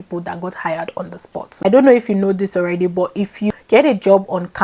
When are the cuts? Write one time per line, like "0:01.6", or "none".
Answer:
0:01.6
0:03.5

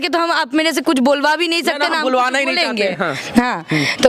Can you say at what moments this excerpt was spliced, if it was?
none

